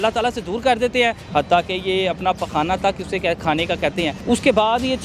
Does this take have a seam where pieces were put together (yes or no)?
yes